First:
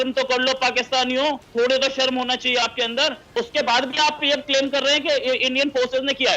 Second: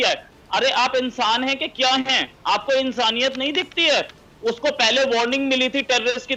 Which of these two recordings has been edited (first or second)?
first